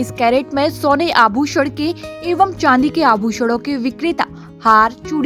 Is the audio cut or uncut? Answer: uncut